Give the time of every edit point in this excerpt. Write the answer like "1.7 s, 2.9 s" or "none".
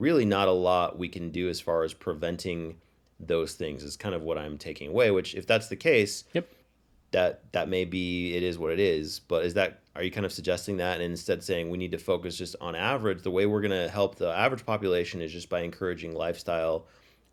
none